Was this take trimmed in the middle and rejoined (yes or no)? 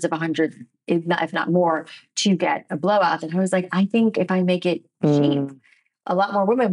no